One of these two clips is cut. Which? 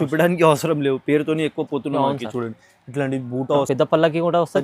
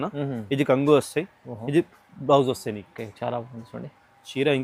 first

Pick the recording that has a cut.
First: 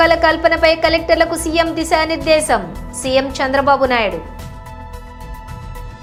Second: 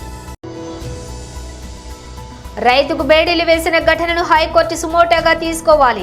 second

